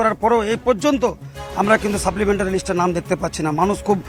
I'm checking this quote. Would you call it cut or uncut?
uncut